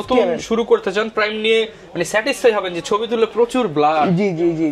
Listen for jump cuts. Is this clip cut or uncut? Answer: uncut